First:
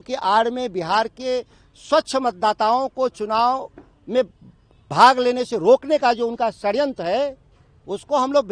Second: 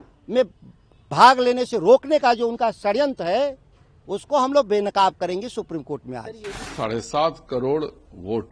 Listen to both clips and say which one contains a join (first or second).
second